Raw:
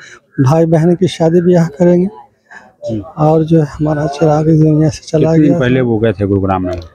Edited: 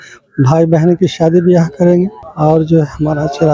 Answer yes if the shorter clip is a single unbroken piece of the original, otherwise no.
no